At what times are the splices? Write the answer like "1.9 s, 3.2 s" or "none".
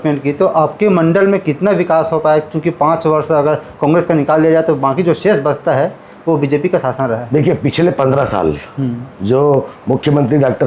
none